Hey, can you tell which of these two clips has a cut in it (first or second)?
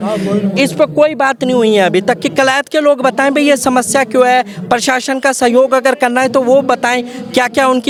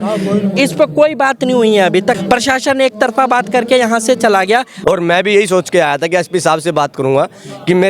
second